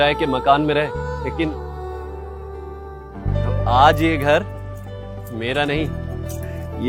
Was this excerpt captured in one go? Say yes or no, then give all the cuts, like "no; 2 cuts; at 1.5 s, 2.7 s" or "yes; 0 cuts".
yes; 0 cuts